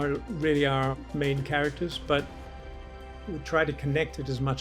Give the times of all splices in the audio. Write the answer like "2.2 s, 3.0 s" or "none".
1.0 s